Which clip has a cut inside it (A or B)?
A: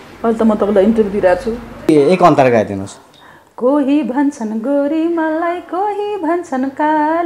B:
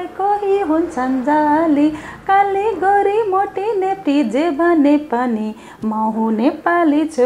A